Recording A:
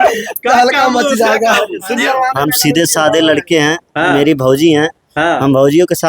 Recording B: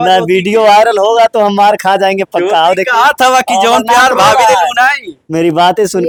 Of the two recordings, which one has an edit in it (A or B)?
A